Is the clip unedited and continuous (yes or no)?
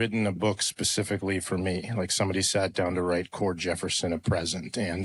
yes